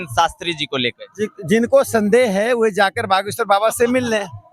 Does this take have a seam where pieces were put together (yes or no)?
no